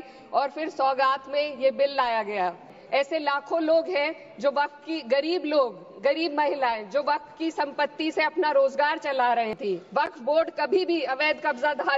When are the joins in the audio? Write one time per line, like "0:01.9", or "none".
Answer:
0:02.8
0:09.5